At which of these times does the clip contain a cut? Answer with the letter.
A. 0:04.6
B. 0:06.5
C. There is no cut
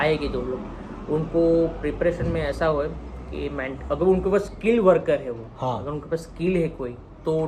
C